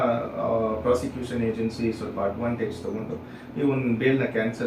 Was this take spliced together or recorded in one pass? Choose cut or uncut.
uncut